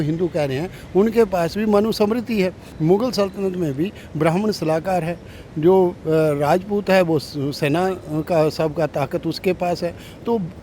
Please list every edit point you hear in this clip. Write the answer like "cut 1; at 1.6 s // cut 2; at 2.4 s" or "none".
cut 1; at 2.6 s